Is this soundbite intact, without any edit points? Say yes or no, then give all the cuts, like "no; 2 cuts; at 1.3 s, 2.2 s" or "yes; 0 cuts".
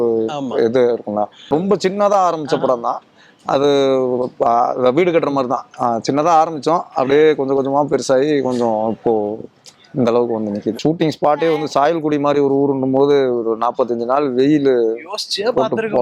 no; 2 cuts; at 1.5 s, 10.8 s